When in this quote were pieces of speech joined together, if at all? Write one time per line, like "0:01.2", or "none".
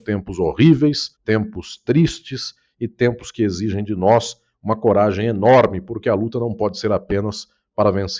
0:01.1